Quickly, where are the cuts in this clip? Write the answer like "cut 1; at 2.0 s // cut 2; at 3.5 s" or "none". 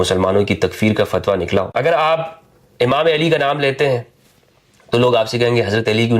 cut 1; at 1.7 s